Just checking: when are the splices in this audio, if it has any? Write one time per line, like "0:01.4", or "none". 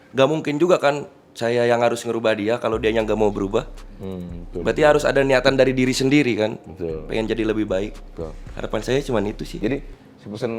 none